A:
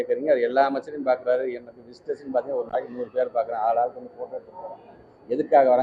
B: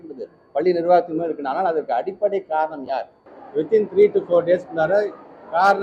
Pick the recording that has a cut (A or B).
B